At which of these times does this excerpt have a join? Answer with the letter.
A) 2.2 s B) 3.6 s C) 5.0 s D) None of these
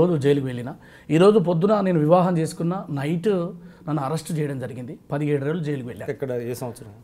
D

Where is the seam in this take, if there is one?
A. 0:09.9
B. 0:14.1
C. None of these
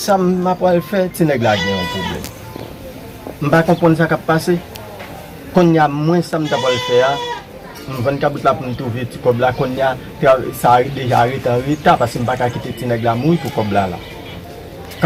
C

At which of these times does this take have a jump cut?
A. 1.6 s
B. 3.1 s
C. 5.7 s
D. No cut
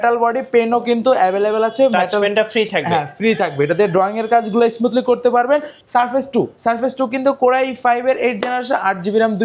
C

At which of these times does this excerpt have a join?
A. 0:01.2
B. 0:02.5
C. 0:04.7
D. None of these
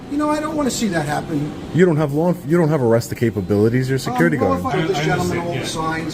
C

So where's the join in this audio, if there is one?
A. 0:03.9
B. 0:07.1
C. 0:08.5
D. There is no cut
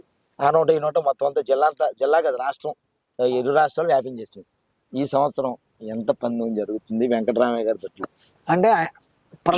D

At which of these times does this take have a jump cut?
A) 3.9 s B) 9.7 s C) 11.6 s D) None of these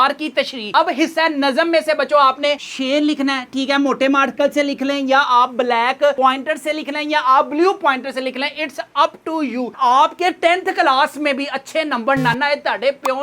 B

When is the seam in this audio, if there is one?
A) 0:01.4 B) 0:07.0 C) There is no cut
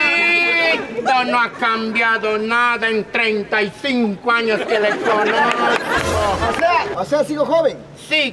B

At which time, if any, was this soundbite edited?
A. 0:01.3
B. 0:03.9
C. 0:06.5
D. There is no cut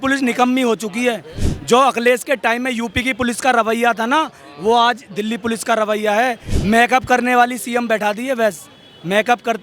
C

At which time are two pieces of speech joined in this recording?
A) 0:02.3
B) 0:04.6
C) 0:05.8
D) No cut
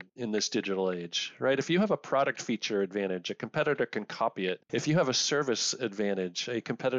B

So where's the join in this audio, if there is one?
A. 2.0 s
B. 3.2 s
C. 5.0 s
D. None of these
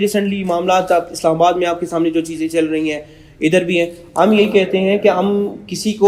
D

